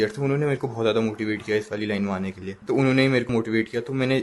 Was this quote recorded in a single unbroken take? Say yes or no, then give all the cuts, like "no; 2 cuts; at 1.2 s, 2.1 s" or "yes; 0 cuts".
no; 2 cuts; at 2.5 s, 3.3 s